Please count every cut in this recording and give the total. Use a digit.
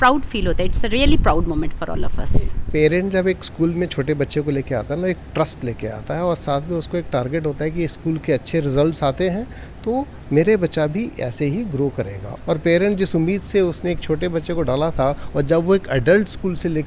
2